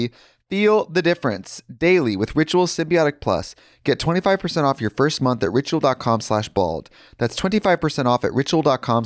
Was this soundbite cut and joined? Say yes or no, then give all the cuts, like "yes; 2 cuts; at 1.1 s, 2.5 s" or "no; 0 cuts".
no; 0 cuts